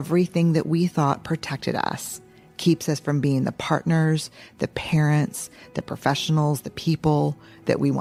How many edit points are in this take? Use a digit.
0